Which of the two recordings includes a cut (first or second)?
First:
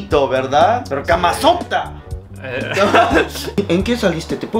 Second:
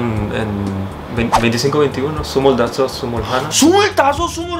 first